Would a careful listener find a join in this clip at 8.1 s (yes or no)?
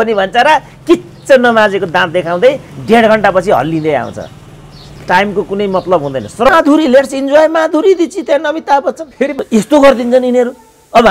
no